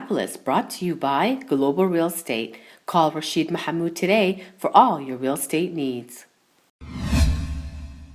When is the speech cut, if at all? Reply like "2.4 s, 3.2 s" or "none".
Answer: 6.8 s